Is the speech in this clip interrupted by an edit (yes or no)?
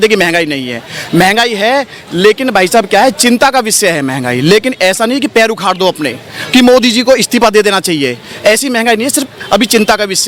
no